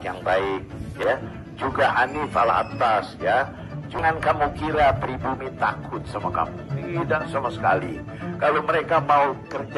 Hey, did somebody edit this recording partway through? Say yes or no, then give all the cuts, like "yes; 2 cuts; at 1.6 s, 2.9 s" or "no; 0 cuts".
no; 0 cuts